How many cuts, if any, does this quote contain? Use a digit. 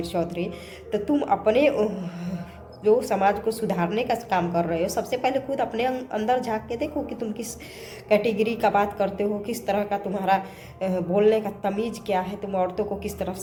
0